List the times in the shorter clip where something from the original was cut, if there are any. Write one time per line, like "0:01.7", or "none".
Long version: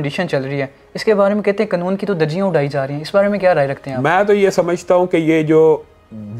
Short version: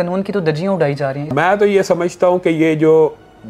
0:01.2